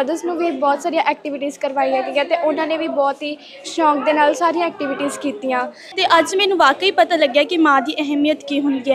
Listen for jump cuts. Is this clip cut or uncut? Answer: cut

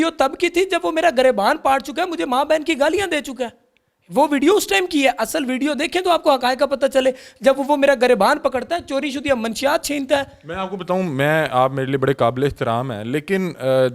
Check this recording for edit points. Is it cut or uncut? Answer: uncut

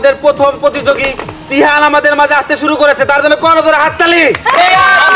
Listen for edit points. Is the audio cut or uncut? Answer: uncut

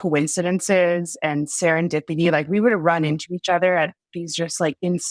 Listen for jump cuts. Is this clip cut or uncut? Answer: uncut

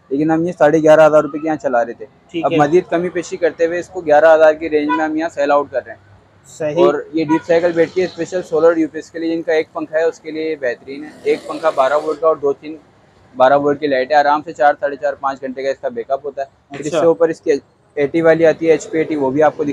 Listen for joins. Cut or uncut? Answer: uncut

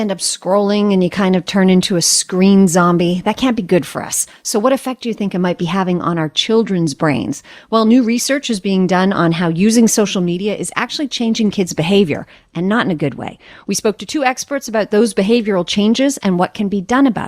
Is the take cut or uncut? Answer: uncut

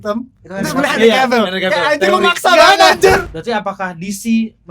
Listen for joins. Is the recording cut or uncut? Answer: cut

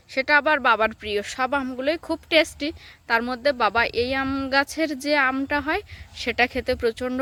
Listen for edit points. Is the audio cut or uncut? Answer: uncut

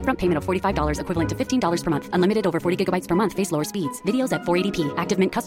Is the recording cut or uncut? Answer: uncut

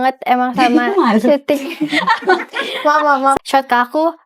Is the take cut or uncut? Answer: cut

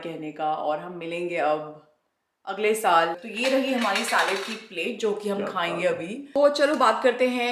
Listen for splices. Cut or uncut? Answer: cut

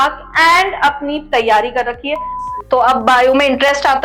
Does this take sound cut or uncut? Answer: cut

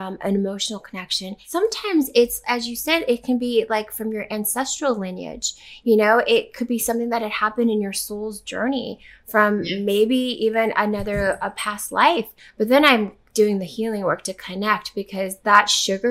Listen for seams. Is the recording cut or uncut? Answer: cut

